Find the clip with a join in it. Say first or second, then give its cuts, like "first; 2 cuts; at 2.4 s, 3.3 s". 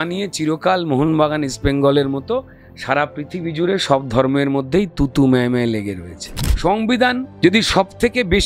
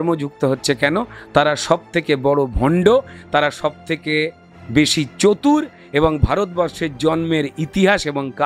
first; 2 cuts; at 6.4 s, 7.3 s